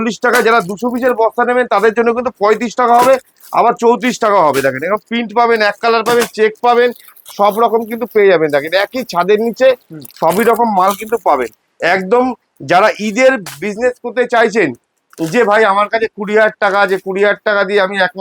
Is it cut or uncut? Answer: uncut